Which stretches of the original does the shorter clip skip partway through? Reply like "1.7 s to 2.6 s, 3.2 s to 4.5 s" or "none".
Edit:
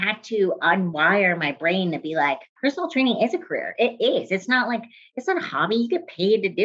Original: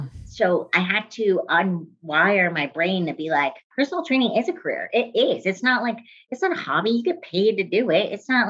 1.8 s to 2.1 s